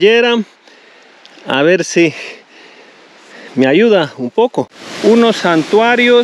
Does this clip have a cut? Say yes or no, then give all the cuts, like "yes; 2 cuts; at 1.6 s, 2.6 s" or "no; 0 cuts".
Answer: yes; 1 cut; at 4.8 s